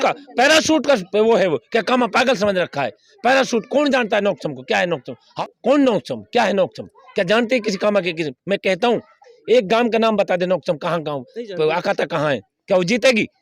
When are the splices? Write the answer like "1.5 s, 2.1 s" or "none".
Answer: 5.2 s